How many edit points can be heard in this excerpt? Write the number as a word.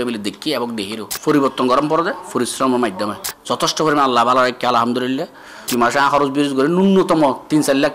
two